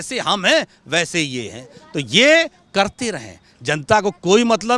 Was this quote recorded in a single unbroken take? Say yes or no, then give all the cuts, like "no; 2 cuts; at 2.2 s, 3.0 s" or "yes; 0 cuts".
yes; 0 cuts